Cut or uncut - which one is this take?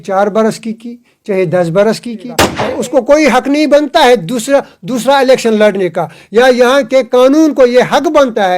cut